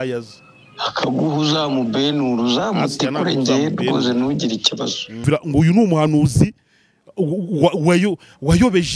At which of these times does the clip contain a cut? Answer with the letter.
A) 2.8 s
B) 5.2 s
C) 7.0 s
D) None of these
B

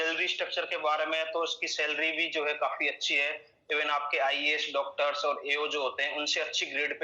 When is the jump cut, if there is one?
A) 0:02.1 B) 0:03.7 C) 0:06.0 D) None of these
D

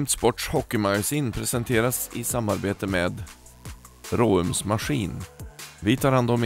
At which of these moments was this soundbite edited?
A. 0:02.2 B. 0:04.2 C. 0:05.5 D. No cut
D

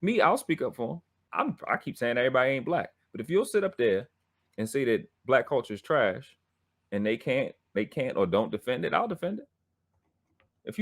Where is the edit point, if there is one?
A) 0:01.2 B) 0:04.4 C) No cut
A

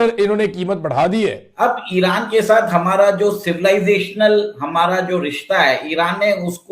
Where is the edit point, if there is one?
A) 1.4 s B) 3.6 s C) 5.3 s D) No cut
A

